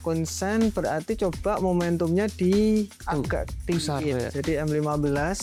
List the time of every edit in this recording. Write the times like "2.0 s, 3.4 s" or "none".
none